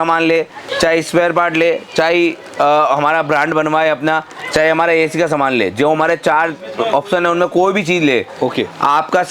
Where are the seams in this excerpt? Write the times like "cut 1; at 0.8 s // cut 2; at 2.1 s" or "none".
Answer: none